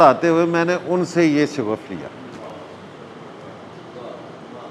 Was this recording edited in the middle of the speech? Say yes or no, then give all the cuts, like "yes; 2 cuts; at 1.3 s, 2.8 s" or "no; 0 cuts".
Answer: no; 0 cuts